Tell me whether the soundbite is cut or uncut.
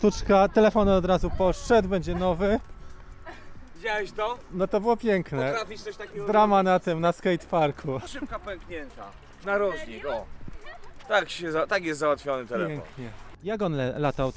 uncut